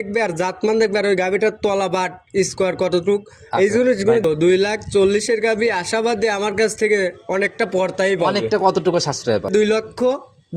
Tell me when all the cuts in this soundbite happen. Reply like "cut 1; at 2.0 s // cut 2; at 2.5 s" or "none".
cut 1; at 4.2 s // cut 2; at 9.5 s